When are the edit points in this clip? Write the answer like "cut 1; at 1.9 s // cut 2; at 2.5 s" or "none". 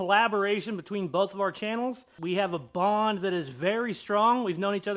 cut 1; at 2.1 s